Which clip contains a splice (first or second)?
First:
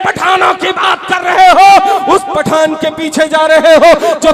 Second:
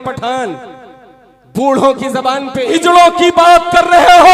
second